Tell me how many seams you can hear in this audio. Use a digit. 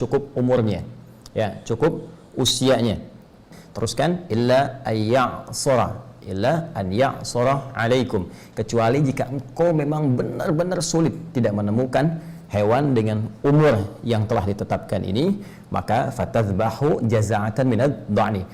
1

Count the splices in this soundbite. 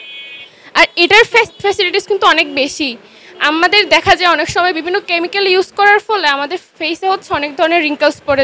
1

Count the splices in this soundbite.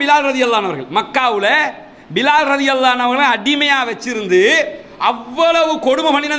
0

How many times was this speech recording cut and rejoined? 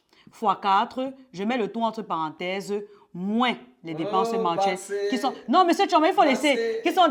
0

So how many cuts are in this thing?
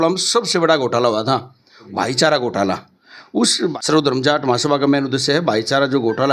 2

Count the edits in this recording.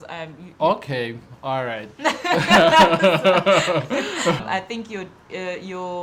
1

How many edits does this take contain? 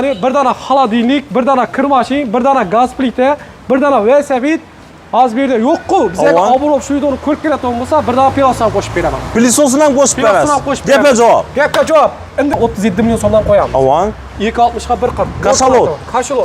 1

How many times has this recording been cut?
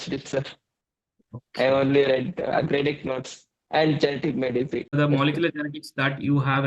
1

